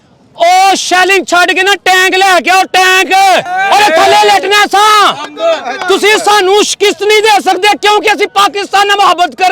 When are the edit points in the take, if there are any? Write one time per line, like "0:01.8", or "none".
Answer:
none